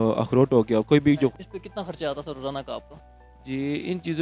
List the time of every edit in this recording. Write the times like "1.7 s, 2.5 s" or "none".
1.4 s